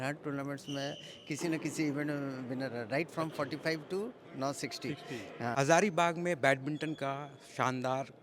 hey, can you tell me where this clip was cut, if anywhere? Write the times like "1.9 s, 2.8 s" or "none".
5.6 s

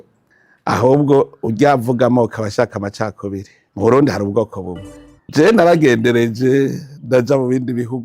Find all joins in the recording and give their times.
3.6 s

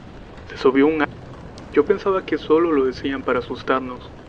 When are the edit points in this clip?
none

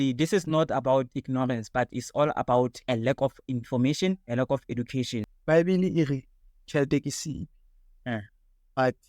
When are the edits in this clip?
5.3 s

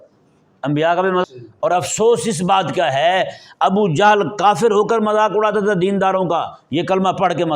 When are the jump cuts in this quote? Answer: 1.2 s

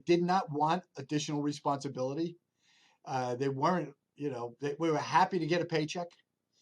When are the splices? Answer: none

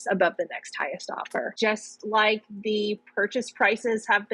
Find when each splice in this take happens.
1.5 s

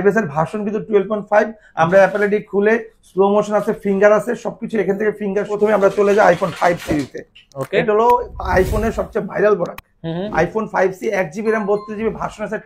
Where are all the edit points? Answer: 5.5 s

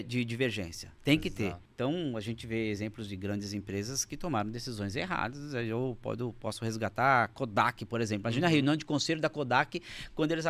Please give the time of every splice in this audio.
1.6 s

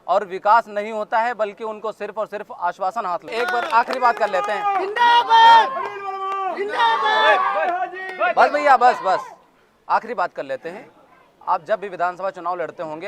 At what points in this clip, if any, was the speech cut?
3.3 s

